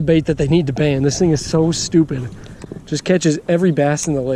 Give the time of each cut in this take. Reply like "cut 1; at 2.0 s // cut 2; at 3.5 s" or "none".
none